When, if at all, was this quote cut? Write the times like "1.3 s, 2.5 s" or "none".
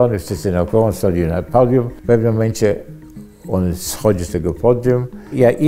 1.9 s